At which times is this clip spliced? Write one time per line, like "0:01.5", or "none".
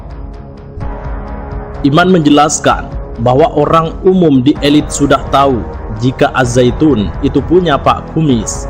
0:01.8